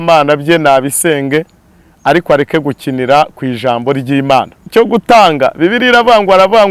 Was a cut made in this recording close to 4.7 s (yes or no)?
yes